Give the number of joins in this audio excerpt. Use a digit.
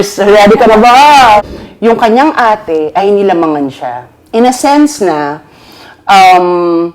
1